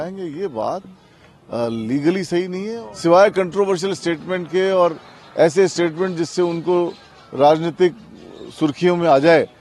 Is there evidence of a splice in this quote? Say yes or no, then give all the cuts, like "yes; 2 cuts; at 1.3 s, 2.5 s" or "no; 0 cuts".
yes; 1 cut; at 2.8 s